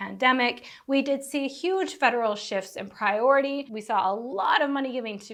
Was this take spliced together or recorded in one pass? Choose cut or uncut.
uncut